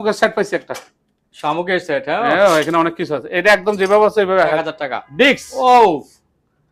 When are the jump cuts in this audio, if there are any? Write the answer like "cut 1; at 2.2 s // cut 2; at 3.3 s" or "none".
cut 1; at 4.7 s